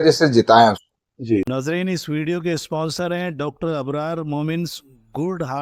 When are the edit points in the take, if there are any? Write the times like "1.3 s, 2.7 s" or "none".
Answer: 1.4 s